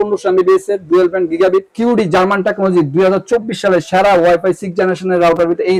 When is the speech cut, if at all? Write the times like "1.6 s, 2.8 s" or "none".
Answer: 1.7 s